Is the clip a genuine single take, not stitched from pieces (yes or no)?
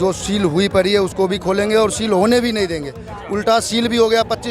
yes